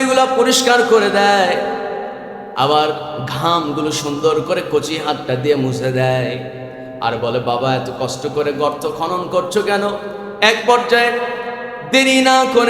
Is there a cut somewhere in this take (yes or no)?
no